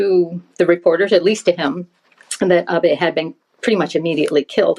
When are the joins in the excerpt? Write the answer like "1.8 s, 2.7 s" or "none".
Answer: none